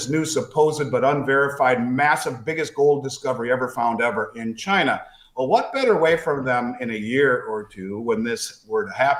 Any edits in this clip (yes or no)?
no